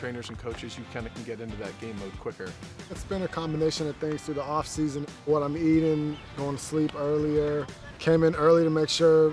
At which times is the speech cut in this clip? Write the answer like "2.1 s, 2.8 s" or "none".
2.6 s, 5.1 s, 7.8 s